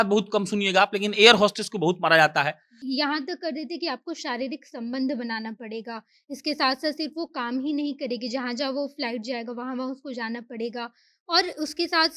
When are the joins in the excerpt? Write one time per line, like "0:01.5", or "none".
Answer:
0:02.7